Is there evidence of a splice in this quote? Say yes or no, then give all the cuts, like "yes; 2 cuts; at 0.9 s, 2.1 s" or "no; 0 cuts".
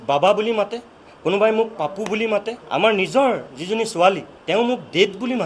yes; 2 cuts; at 2.6 s, 4.3 s